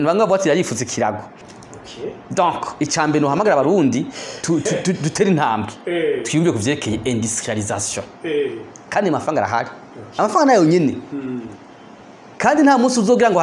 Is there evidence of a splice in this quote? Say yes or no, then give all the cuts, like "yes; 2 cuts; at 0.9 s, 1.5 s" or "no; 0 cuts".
yes; 1 cut; at 1.4 s